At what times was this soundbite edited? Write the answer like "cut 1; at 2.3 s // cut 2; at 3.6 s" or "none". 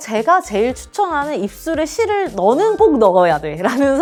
none